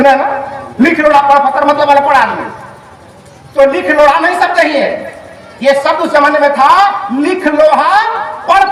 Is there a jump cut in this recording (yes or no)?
no